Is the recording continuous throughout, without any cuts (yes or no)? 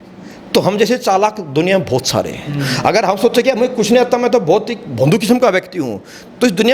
yes